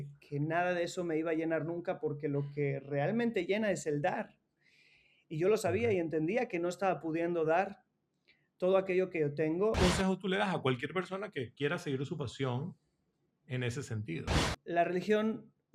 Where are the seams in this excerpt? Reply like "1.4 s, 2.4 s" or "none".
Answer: 9.8 s, 14.4 s